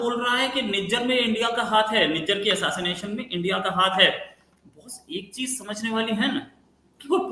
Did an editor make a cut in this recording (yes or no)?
no